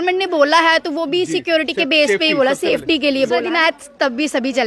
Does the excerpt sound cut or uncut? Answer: cut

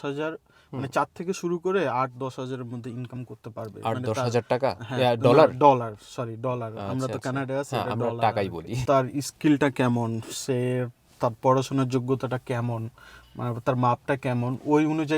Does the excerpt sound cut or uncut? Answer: cut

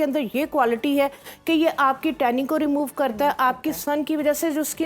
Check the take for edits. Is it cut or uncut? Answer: uncut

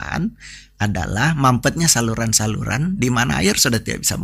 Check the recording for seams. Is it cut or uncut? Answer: uncut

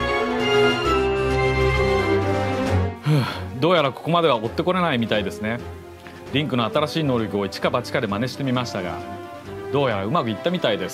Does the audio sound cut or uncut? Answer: uncut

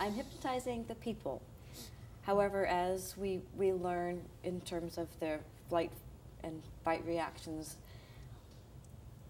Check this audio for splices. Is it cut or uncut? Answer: uncut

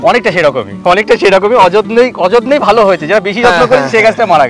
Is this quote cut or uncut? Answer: uncut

